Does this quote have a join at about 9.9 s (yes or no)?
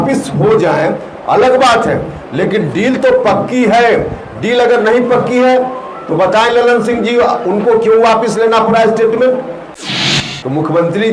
yes